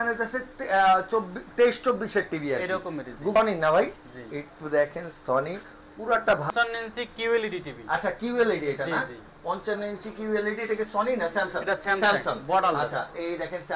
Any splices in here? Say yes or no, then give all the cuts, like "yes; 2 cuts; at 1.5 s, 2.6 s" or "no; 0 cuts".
yes; 2 cuts; at 3.3 s, 6.5 s